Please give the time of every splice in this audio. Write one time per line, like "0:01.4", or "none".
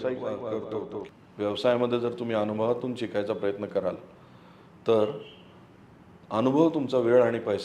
0:00.9